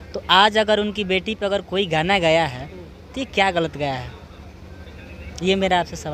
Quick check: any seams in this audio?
no; 0 cuts

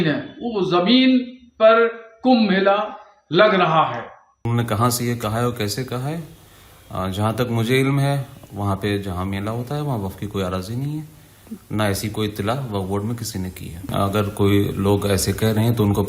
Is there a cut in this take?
yes; 2 cuts; at 4.2 s, 13.9 s

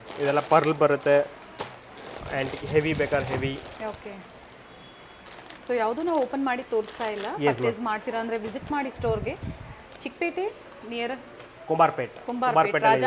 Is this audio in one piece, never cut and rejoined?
yes; 0 cuts

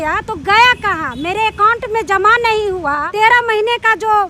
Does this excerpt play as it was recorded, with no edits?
no; 1 cut; at 3.1 s

